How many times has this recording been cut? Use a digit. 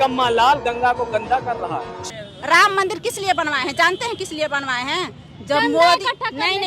1